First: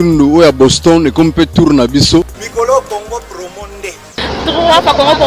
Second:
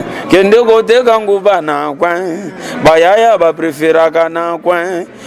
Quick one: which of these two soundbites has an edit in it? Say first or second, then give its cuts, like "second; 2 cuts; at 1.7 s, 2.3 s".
first; 1 cut; at 2.4 s